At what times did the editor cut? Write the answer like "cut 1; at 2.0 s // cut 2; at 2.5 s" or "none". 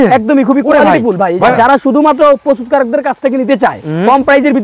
cut 1; at 1.5 s

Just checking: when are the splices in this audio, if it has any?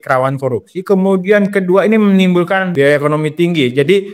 cut 1; at 2.7 s

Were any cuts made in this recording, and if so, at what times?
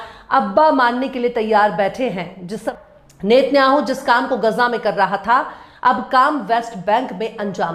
cut 1; at 2.7 s

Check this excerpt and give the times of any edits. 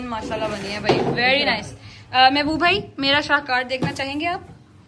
none

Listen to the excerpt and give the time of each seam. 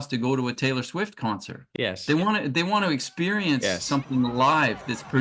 cut 1; at 1.6 s

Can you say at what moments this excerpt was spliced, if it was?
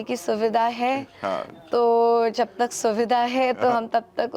none

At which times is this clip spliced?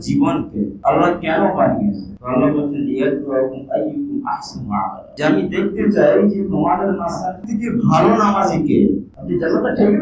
cut 1; at 7.4 s // cut 2; at 9.1 s

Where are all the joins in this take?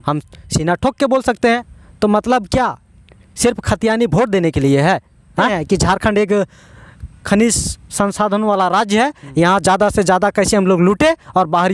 cut 1; at 1.8 s // cut 2; at 5.5 s

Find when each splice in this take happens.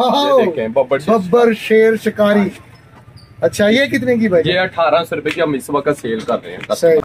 none

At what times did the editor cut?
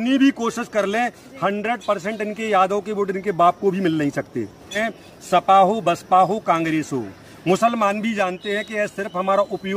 cut 1; at 4.8 s

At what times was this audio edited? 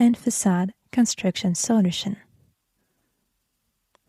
none

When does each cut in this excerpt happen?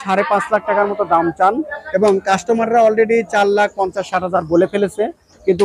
none

